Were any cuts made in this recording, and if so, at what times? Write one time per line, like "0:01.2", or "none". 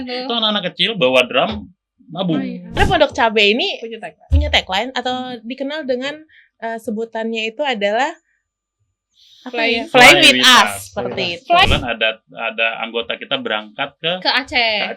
0:02.8
0:11.7